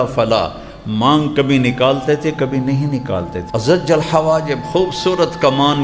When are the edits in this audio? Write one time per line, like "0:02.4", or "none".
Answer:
0:03.4